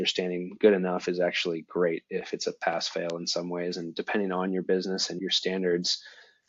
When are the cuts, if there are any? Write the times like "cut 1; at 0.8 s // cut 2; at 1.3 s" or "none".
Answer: cut 1; at 5.2 s